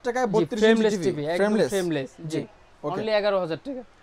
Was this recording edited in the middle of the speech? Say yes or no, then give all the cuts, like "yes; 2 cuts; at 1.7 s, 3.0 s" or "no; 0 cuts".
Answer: no; 0 cuts